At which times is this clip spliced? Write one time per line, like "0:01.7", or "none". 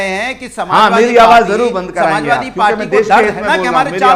none